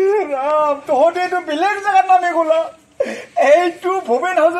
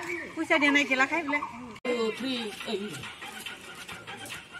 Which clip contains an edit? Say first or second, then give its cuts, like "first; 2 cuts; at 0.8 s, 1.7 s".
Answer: second; 1 cut; at 1.8 s